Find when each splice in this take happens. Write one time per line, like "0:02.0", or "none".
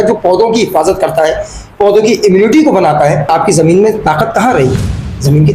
0:03.3